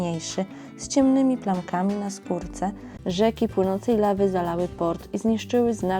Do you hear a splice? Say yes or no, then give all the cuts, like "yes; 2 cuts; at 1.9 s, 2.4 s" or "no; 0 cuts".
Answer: yes; 1 cut; at 2.9 s